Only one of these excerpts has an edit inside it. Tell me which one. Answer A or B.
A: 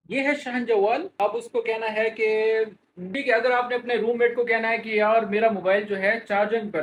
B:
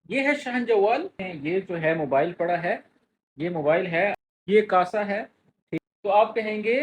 B